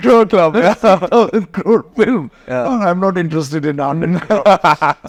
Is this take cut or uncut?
uncut